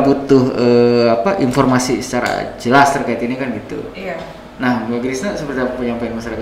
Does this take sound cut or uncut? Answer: uncut